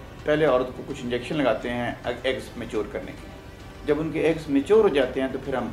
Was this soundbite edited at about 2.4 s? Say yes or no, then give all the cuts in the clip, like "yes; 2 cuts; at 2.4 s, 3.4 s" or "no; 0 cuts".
no; 0 cuts